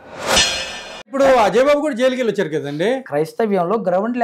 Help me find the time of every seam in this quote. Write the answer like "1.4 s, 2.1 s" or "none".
3.0 s